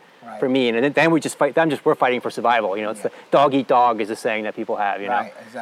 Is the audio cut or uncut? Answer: uncut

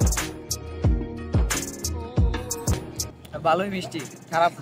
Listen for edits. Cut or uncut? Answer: cut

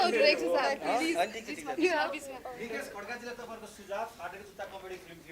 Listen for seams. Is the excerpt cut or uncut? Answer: uncut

